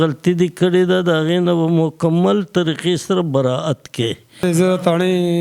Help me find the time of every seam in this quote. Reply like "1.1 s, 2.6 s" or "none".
4.3 s

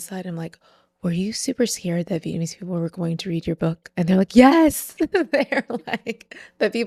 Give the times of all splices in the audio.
none

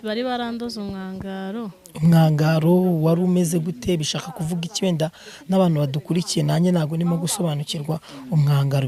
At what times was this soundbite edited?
none

